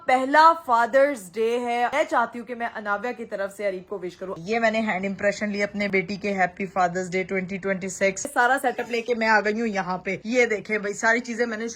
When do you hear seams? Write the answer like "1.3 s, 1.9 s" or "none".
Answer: 1.9 s, 4.3 s, 5.9 s, 8.3 s